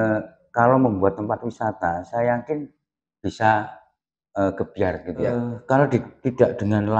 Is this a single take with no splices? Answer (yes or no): no